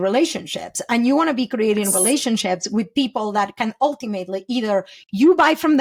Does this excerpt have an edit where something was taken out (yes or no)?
no